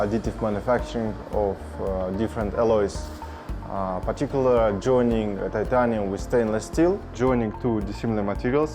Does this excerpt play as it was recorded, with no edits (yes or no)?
no